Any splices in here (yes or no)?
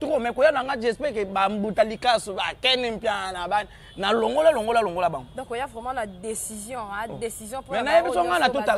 no